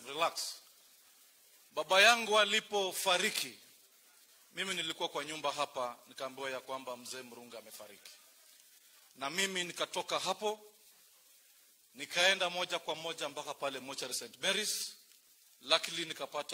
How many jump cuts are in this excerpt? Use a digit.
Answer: 0